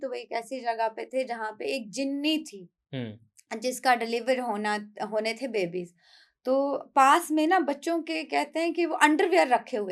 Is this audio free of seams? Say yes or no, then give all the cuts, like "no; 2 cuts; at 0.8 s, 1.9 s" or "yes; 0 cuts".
yes; 0 cuts